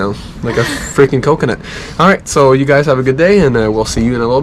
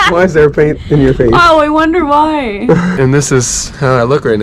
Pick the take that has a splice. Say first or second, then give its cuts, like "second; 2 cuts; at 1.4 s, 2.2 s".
second; 1 cut; at 3.0 s